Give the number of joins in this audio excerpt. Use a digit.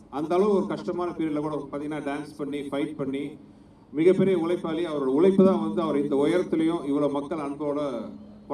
0